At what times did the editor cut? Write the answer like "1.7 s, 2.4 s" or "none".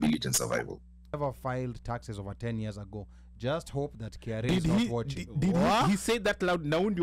1.1 s